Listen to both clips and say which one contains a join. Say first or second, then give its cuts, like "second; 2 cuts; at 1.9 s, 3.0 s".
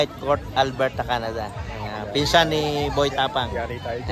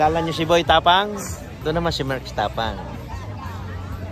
second; 1 cut; at 1.6 s